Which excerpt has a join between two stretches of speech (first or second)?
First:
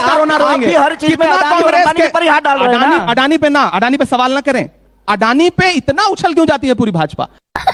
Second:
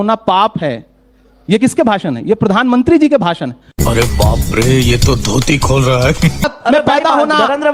second